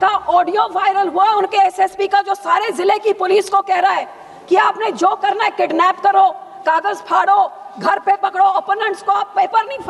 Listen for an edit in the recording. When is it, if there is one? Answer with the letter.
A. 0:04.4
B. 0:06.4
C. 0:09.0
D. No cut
D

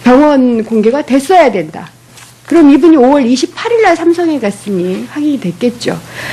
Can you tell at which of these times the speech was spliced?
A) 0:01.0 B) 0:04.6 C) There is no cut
C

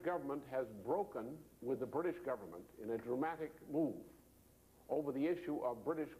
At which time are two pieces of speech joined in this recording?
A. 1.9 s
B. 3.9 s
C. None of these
C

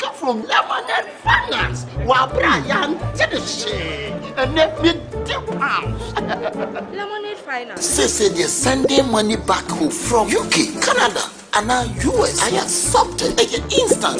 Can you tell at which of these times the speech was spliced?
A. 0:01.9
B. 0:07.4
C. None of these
C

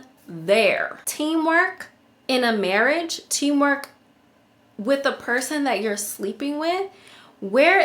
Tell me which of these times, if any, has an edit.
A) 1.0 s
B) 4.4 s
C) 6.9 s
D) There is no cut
A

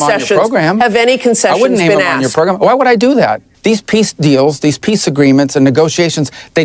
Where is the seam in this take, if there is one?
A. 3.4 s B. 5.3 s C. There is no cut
A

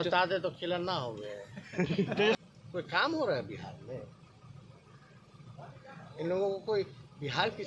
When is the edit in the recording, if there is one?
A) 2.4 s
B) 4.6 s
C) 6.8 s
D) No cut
A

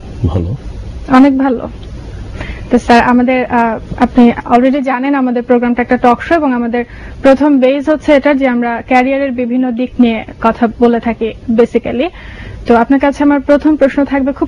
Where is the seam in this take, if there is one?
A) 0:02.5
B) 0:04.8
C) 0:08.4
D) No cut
C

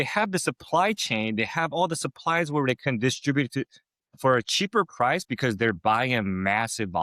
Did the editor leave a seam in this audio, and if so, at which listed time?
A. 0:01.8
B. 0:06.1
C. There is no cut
C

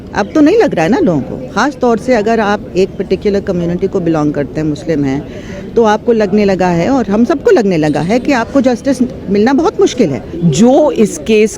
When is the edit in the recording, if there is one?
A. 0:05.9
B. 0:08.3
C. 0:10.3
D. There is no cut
C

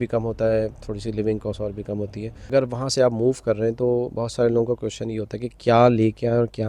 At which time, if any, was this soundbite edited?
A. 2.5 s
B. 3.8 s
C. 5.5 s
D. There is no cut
A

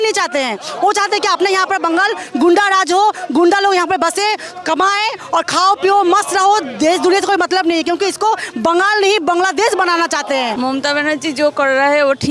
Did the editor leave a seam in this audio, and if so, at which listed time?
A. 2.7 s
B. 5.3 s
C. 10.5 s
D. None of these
C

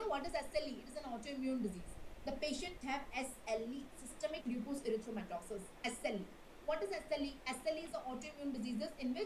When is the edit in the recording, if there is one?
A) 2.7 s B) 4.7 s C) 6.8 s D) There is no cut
A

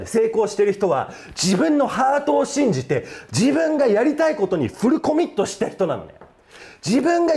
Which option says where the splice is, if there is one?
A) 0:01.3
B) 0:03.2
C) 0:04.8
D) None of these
D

